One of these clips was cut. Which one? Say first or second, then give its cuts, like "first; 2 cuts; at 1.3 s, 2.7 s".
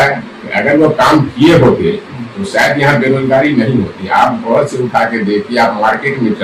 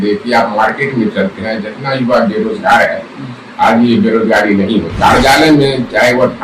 second; 1 cut; at 4.9 s